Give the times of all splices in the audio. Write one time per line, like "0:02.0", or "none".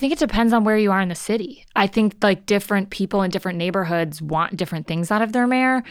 none